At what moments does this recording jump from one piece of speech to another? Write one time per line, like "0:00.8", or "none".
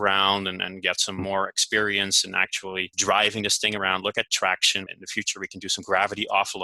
0:02.9
0:05.0